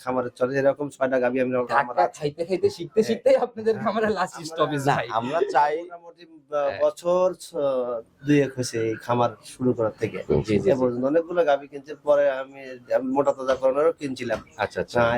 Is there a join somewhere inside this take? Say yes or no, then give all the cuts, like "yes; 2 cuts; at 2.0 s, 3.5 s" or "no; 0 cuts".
no; 0 cuts